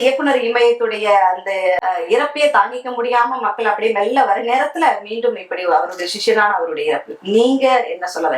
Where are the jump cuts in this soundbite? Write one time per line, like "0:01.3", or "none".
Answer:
none